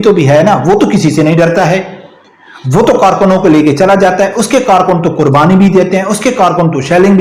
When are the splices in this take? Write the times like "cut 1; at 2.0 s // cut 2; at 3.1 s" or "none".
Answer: none